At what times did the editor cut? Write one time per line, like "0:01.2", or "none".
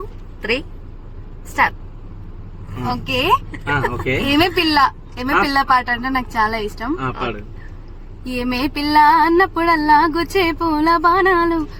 none